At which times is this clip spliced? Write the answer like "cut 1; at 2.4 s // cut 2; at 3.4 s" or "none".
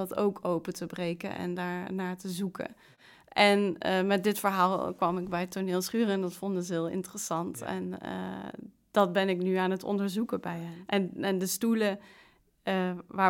cut 1; at 10.7 s